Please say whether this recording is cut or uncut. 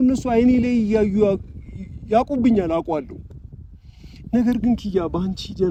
uncut